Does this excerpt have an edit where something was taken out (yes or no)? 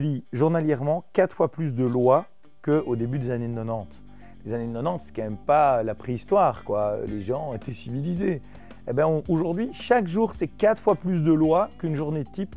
no